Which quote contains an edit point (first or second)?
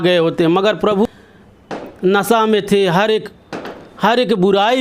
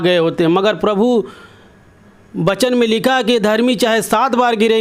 first